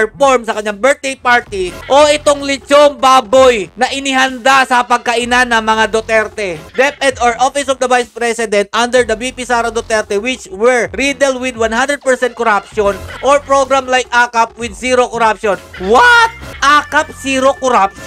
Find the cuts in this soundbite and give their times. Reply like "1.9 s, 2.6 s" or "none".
1.8 s, 6.6 s, 16.5 s